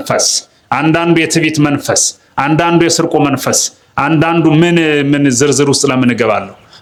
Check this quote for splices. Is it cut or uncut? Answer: uncut